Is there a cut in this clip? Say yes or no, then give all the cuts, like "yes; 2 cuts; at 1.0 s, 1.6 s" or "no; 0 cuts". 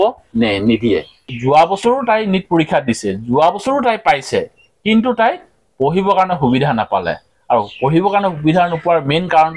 yes; 1 cut; at 1.2 s